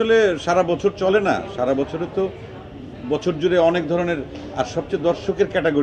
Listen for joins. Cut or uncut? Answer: uncut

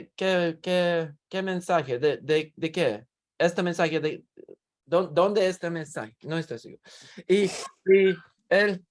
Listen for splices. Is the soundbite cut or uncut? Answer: uncut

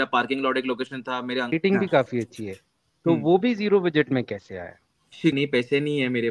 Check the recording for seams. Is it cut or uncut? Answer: cut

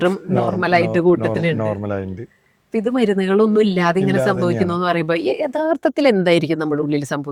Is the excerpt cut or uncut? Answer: uncut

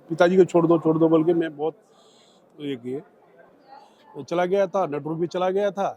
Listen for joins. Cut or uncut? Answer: cut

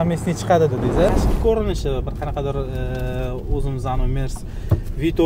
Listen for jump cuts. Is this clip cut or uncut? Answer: cut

